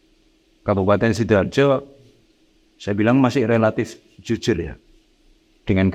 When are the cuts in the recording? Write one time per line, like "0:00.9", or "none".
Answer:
none